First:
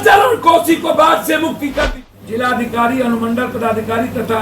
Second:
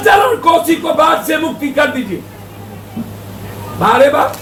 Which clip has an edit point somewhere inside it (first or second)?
first